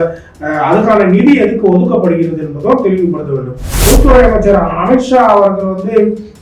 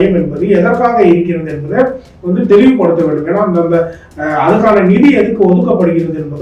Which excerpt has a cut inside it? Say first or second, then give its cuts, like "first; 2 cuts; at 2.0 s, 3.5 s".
first; 1 cut; at 3.7 s